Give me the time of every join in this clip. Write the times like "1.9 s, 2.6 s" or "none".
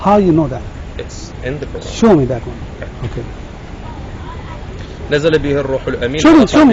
none